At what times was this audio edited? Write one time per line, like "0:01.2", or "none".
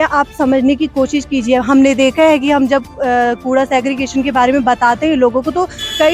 none